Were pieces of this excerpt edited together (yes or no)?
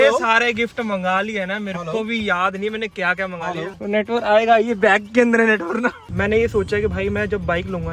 yes